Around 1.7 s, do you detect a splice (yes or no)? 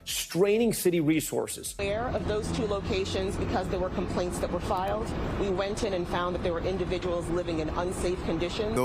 yes